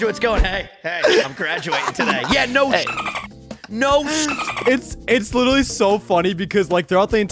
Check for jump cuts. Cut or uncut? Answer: cut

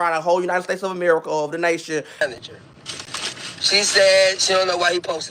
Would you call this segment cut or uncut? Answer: cut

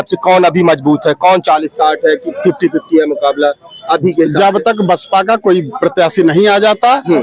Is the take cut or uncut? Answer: uncut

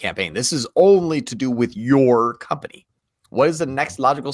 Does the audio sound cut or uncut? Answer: uncut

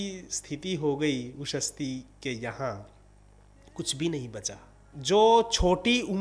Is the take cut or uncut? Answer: cut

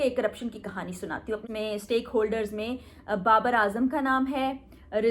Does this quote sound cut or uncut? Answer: cut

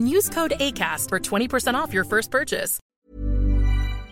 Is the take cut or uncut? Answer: cut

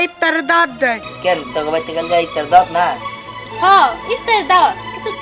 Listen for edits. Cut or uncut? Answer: cut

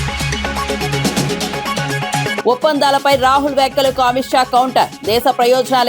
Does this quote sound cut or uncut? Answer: cut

